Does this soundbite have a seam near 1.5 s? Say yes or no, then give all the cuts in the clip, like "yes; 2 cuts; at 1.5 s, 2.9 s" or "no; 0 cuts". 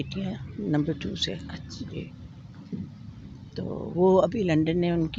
no; 0 cuts